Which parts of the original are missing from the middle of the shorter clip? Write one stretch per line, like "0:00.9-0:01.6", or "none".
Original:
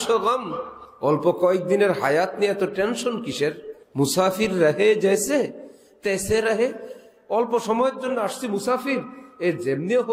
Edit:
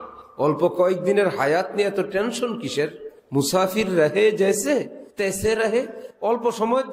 0:05.6-0:05.9
0:06.9-0:07.1